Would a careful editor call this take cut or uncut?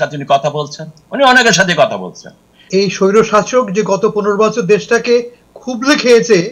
cut